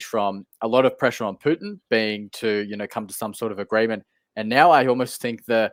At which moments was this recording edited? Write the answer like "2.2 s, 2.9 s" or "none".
none